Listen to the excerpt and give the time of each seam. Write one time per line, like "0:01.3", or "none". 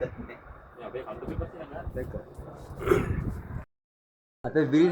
0:03.7